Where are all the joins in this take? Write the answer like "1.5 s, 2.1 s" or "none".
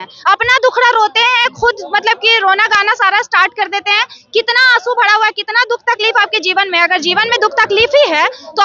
none